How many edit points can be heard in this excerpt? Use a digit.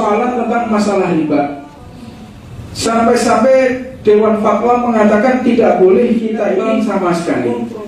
1